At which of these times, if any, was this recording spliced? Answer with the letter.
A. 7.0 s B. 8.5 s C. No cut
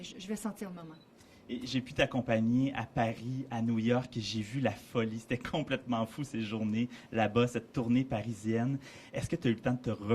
A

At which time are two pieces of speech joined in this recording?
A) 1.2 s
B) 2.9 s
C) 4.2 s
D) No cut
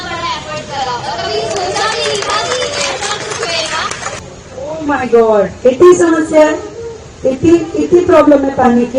C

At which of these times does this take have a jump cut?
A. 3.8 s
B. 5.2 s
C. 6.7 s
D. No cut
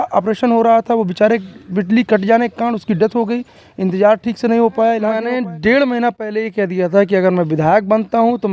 B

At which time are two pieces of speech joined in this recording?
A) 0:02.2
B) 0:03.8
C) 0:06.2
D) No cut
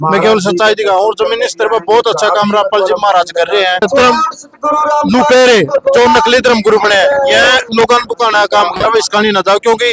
B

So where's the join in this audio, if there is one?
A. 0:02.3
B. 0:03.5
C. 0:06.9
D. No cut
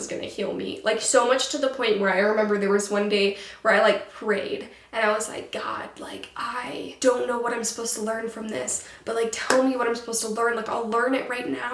C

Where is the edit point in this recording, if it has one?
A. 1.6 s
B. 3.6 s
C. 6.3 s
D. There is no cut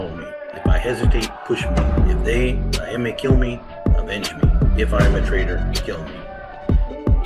C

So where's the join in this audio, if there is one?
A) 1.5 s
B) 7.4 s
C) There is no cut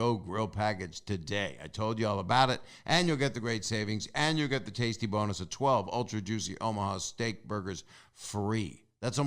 C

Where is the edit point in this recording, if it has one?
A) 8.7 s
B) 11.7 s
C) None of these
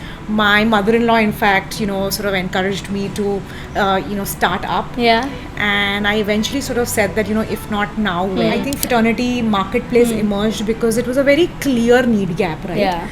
A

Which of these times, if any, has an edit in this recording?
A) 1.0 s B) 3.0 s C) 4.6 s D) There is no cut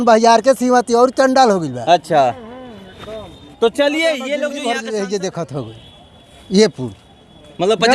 C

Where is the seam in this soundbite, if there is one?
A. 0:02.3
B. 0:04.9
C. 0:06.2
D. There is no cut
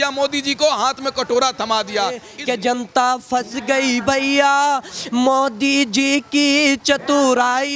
A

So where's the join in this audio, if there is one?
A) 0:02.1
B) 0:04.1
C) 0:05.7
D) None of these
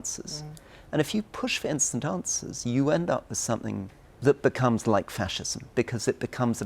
B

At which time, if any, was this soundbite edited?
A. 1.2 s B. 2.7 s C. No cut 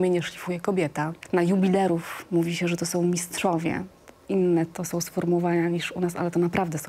A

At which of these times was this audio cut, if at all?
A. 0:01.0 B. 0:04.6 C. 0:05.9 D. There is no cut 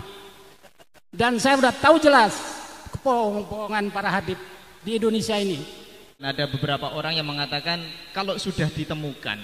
C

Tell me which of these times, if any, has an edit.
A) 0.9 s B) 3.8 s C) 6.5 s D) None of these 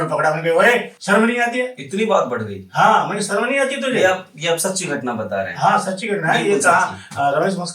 A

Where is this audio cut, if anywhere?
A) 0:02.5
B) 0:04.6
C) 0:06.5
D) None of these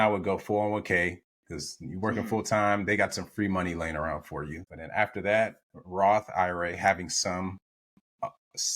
B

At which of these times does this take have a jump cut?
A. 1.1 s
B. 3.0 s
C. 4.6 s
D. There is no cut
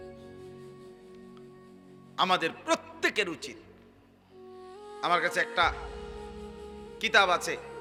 D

